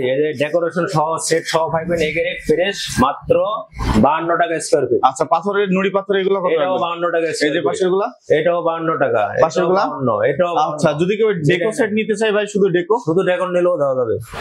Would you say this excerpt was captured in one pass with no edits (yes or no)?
yes